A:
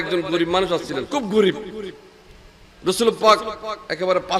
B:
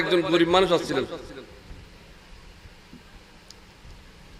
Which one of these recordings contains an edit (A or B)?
A